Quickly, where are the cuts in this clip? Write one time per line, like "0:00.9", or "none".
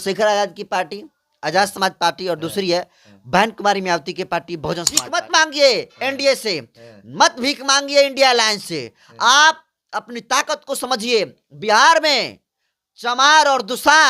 0:05.0